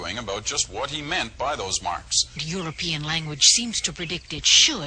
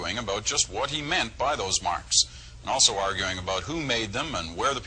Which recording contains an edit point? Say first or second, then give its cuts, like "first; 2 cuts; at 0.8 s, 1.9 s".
second; 1 cut; at 2.3 s